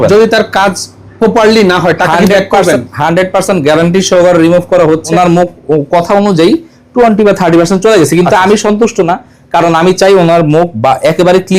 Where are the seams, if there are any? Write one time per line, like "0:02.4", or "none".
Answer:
0:05.1